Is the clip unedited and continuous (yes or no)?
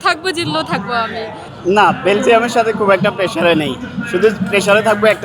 no